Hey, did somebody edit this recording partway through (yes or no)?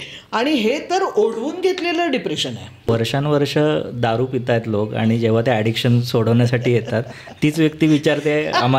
yes